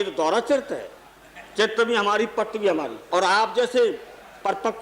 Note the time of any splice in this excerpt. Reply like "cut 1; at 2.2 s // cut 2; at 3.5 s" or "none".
cut 1; at 3.0 s